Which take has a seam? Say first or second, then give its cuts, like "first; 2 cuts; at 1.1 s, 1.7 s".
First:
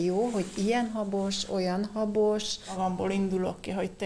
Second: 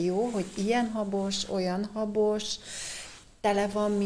first; 1 cut; at 2.7 s